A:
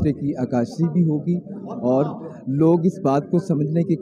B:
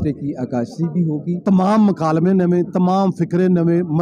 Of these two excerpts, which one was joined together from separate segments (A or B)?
B